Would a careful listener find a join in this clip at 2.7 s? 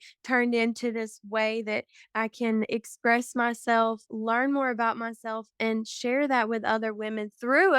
yes; 1 cut; at 2.7 s

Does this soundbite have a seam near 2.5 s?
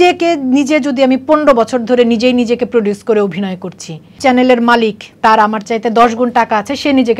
no; 1 cut; at 4.2 s

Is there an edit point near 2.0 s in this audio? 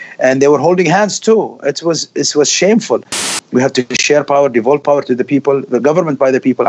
no; 1 cut; at 3.3 s

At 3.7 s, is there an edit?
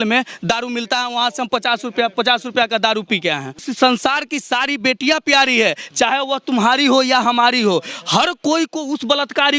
yes; 1 cut; at 3.7 s

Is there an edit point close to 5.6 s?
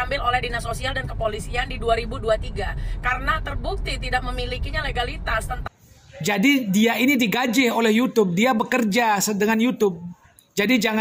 yes; 1 cut; at 5.6 s

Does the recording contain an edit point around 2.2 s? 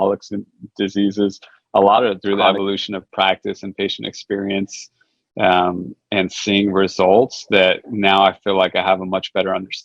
yes; 1 cut; at 2.2 s

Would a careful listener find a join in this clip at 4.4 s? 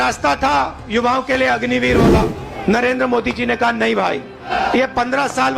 yes; 2 cuts; at 2.4 s, 4.4 s

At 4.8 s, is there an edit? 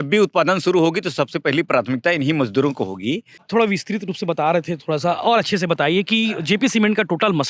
no; 1 cut; at 3.5 s

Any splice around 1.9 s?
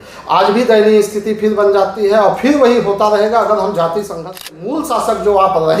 no; 1 cut; at 4.5 s

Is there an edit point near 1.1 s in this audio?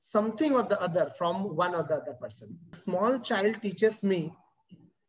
no; 1 cut; at 2.8 s

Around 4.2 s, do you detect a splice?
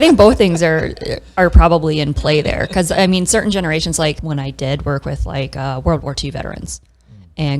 yes; 1 cut; at 4.2 s

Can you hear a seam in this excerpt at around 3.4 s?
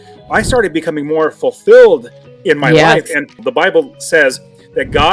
yes; 1 cut; at 3.4 s

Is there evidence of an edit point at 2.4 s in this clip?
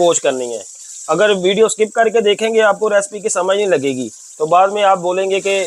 no; 0 cuts

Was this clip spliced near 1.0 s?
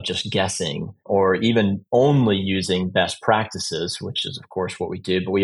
yes; 1 cut; at 1.0 s

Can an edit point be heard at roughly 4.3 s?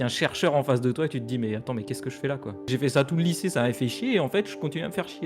no; 1 cut; at 2.6 s

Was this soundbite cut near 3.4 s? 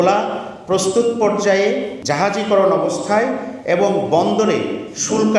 no; 1 cut; at 2.0 s

